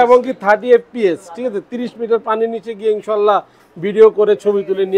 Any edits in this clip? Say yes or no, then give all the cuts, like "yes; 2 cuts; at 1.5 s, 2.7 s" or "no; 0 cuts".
no; 0 cuts